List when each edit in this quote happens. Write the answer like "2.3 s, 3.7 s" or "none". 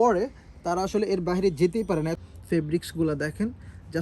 2.2 s

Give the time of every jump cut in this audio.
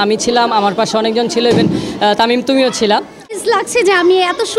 3.4 s

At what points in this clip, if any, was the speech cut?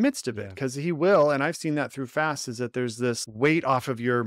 3.2 s

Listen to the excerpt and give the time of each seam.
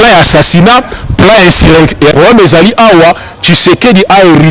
2.0 s

